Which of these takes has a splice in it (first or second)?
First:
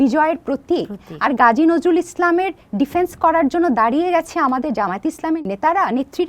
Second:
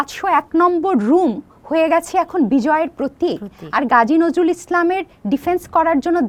first